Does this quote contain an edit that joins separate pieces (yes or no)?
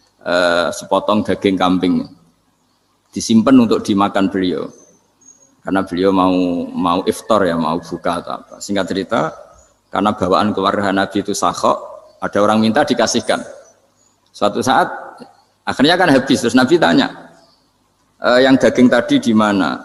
no